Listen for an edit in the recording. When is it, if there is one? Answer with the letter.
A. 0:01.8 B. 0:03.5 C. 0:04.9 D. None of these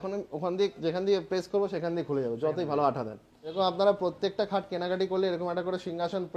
B